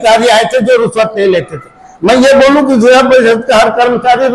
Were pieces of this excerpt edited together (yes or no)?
no